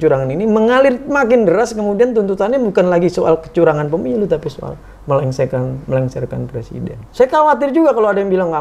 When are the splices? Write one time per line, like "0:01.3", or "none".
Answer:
0:07.0